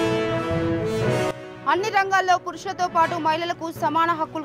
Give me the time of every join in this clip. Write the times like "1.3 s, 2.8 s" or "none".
1.3 s